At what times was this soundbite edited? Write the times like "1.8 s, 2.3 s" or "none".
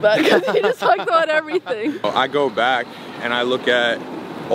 2.0 s